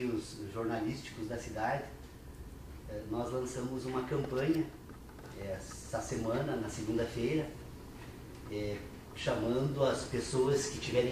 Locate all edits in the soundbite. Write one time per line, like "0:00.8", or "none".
0:03.6